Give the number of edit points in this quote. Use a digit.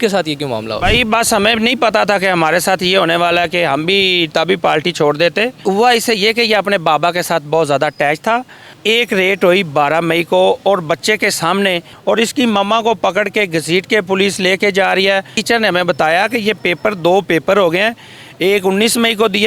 4